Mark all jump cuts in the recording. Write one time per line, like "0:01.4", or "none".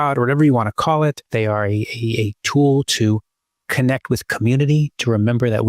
0:01.2